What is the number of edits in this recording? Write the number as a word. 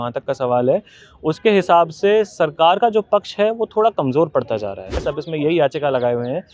one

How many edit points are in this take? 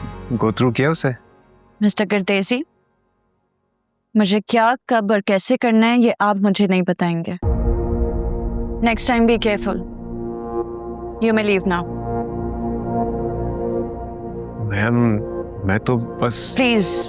zero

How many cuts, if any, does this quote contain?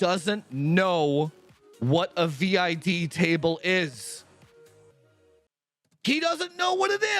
one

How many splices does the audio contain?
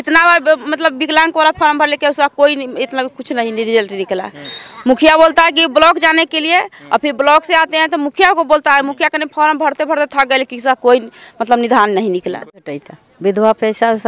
one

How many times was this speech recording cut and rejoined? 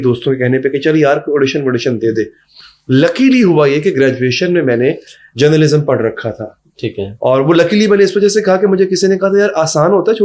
zero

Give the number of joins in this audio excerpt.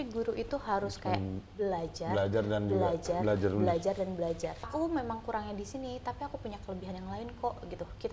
one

